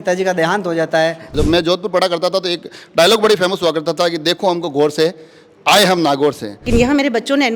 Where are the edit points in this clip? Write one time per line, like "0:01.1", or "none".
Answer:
0:01.2
0:06.7